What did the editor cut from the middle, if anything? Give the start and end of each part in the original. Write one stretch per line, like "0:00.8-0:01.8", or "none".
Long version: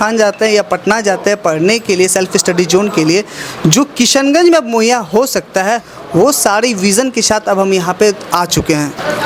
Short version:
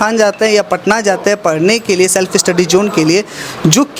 none